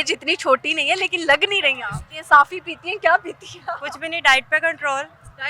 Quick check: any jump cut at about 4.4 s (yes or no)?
no